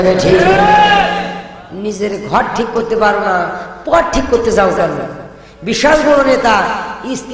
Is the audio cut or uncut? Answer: cut